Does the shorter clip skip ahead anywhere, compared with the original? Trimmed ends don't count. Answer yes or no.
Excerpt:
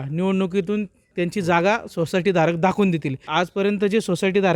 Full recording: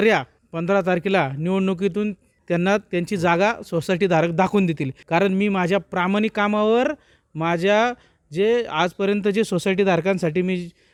yes